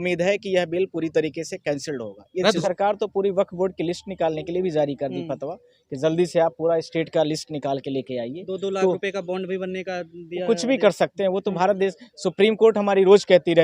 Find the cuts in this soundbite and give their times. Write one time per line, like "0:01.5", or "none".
0:02.6